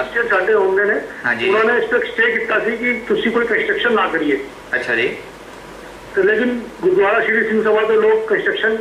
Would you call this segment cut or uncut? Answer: uncut